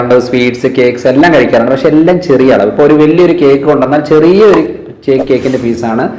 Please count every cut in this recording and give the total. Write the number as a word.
zero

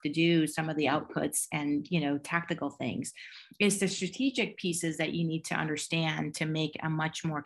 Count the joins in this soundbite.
zero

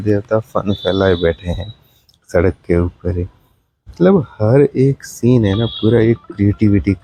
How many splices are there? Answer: zero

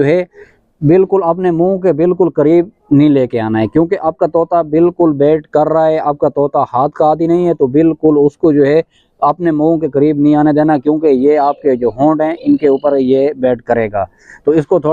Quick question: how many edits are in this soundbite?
zero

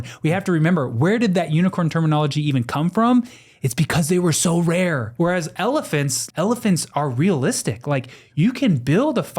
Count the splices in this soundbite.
two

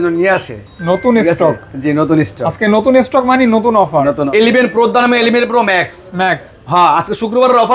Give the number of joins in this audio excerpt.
one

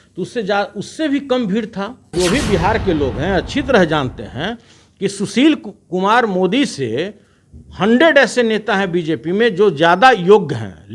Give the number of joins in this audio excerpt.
one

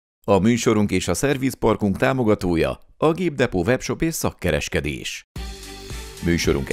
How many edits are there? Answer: one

